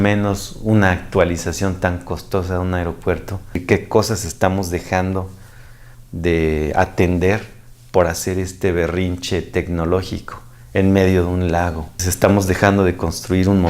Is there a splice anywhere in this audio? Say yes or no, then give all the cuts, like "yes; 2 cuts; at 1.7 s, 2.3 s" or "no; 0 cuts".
yes; 2 cuts; at 3.6 s, 12.0 s